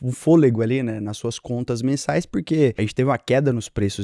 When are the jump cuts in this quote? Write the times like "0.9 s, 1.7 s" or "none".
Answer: none